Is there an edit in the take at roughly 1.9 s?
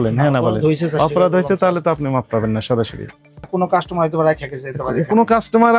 no; 1 cut; at 3.5 s

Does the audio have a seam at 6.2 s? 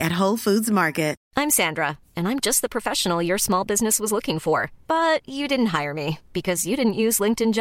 no; 1 cut; at 1.2 s

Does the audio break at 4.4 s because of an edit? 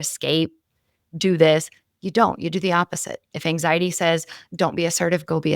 yes; 1 cut; at 4.4 s

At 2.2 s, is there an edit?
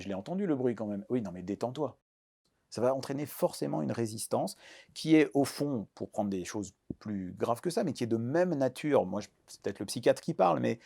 yes; 1 cut; at 2.2 s

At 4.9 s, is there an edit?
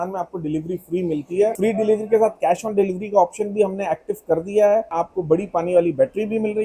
yes; 2 cuts; at 1.6 s, 4.9 s

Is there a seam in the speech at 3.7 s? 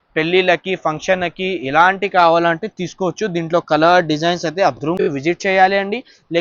no; 1 cut; at 5.0 s

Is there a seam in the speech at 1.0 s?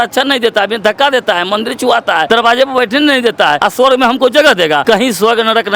no; 3 cuts; at 2.2 s, 3.6 s, 4.8 s

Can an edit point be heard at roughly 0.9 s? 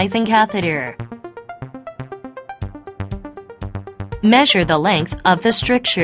yes; 2 cuts; at 0.9 s, 4.2 s

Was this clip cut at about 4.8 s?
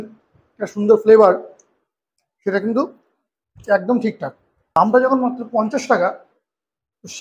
yes; 1 cut; at 4.8 s

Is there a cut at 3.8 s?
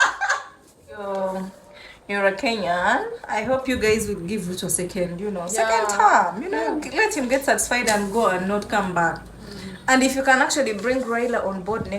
no; 1 cut; at 1.1 s

